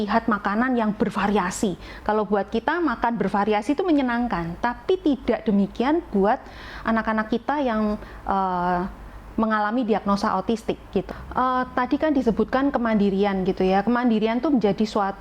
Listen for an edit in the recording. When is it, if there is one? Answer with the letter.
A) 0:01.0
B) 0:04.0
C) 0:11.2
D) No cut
C